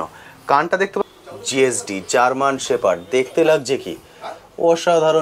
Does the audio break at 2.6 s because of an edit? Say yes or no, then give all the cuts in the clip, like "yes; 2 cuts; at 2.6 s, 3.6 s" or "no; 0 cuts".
no; 1 cut; at 1.0 s